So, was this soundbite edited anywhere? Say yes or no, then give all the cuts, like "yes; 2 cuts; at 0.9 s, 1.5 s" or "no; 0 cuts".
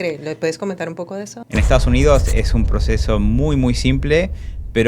yes; 1 cut; at 1.3 s